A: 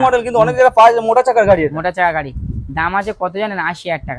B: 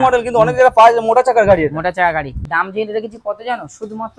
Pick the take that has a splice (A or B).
B